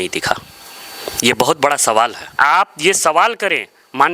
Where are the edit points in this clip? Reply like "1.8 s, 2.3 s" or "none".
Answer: 2.2 s